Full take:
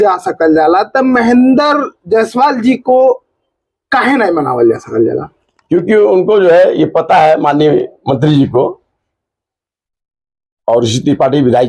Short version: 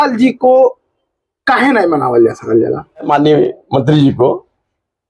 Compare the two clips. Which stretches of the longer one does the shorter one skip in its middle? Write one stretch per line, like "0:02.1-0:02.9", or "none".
0:05.5-0:07.4